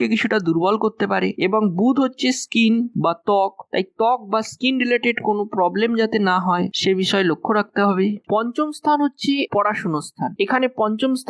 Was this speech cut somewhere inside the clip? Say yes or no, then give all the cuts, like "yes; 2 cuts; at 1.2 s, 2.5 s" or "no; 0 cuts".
yes; 1 cut; at 8.2 s